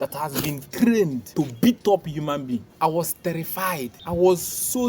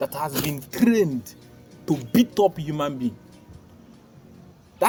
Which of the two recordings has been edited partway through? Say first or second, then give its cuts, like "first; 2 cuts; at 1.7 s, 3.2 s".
first; 3 cuts; at 1.2 s, 2.7 s, 4.0 s